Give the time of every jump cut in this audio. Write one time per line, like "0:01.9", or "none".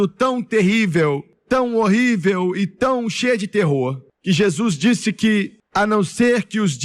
0:01.3
0:04.1
0:05.6